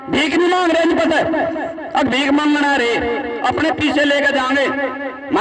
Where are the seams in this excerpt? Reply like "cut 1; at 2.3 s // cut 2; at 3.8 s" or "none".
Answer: none